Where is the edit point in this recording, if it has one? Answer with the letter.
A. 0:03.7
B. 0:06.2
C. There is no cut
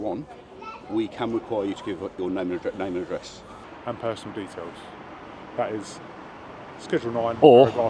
A